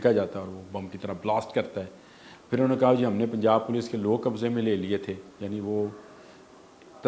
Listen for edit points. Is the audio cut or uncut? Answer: uncut